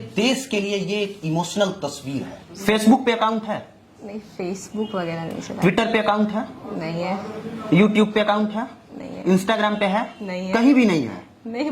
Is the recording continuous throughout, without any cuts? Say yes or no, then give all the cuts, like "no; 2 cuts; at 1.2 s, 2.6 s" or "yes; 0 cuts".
no; 1 cut; at 2.6 s